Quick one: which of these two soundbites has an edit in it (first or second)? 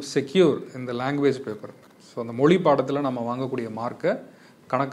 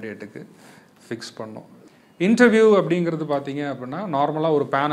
second